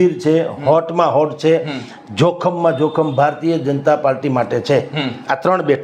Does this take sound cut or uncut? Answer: uncut